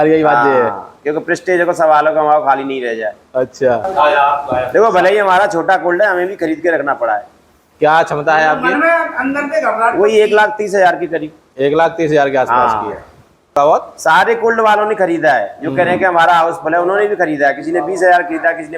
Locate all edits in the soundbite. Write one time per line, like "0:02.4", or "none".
0:03.8
0:13.6